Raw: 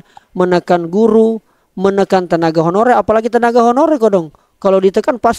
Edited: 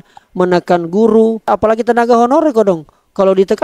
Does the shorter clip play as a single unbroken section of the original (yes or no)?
no